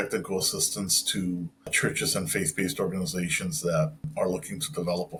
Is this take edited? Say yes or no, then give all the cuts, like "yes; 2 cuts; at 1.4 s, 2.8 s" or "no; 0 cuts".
no; 0 cuts